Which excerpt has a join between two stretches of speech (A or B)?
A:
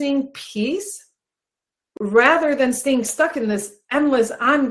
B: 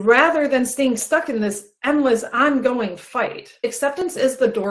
B